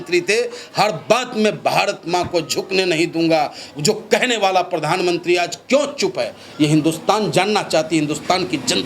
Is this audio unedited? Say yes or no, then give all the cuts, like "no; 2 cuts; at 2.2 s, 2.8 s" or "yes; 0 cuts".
yes; 0 cuts